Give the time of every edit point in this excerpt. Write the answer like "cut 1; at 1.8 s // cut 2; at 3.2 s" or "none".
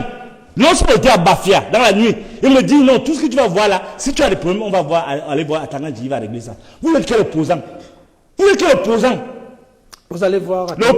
none